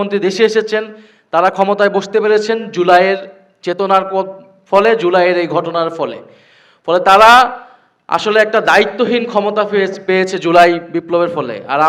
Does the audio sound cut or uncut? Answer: uncut